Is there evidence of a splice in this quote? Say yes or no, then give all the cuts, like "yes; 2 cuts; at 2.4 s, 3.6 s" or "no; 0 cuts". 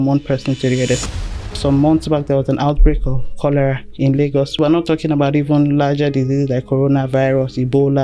yes; 2 cuts; at 1.1 s, 4.5 s